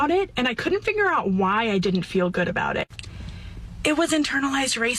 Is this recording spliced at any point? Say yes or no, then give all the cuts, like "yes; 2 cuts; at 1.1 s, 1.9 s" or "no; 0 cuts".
no; 0 cuts